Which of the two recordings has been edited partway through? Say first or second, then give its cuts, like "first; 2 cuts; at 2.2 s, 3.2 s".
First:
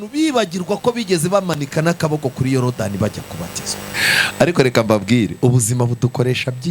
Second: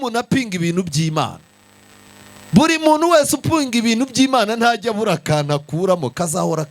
first; 1 cut; at 3.8 s